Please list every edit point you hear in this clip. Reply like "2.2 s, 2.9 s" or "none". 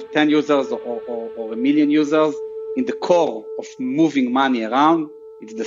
none